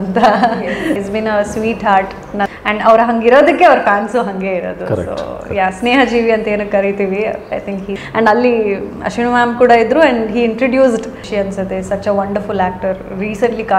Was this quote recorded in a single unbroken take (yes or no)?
no